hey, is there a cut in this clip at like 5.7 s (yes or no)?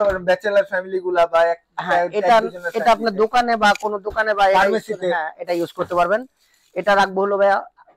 no